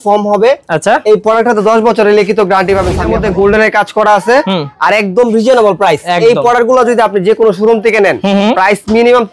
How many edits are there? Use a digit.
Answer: 1